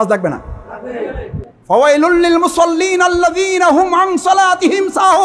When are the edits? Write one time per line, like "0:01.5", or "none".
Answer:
0:01.5